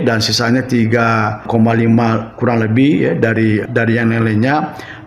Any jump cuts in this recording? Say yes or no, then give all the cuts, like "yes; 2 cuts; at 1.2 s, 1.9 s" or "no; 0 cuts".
yes; 2 cuts; at 1.4 s, 3.7 s